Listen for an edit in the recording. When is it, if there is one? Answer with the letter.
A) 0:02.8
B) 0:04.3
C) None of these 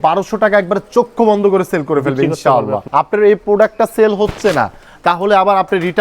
A